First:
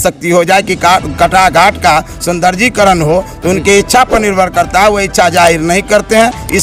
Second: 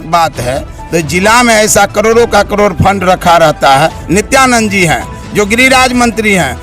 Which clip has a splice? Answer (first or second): second